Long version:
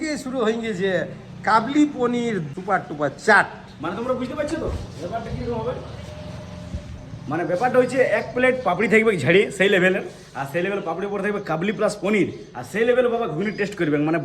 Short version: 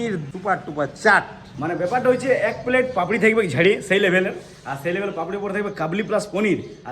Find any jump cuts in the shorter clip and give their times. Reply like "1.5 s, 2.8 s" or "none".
1.4 s